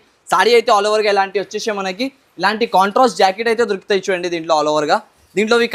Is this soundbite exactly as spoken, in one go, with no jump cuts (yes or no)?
yes